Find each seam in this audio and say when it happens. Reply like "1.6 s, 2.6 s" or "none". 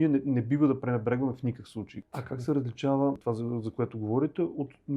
2.0 s, 3.2 s